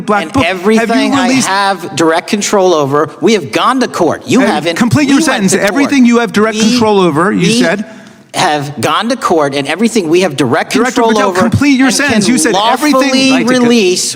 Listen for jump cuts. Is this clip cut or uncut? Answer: uncut